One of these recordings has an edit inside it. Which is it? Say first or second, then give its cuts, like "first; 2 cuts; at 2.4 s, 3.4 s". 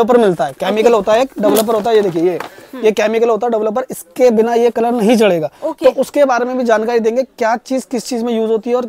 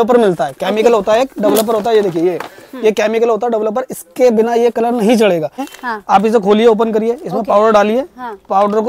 second; 1 cut; at 5.7 s